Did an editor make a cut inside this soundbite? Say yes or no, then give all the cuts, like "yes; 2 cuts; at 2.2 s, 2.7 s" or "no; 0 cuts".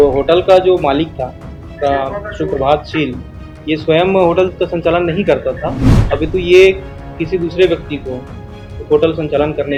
no; 0 cuts